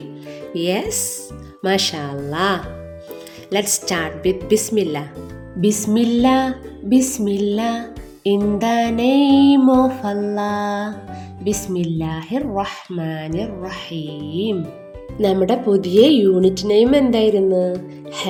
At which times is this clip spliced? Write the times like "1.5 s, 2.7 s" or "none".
none